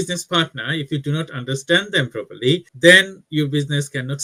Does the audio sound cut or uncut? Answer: uncut